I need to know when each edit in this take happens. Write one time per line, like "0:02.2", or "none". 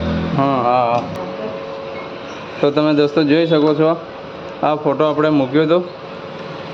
0:01.1